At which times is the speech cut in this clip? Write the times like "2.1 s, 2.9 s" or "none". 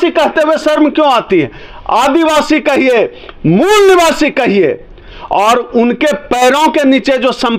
none